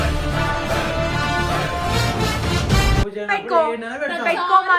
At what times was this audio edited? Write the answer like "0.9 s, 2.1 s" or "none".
none